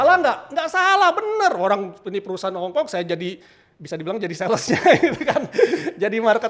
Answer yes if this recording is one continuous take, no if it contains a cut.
yes